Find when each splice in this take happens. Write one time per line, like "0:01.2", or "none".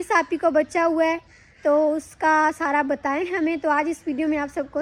none